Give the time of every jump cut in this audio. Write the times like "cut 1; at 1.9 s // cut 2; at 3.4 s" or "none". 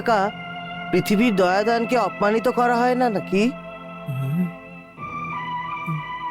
none